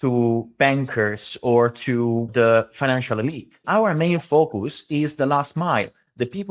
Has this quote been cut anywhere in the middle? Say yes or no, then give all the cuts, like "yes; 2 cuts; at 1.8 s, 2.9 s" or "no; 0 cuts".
yes; 2 cuts; at 2.3 s, 3.6 s